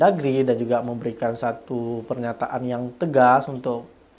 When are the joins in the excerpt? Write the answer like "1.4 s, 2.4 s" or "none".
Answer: none